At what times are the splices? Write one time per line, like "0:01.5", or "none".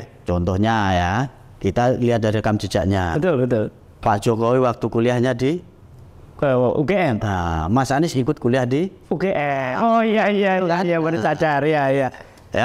none